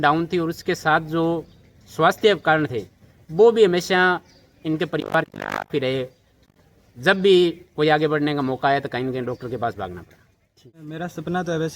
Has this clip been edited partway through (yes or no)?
yes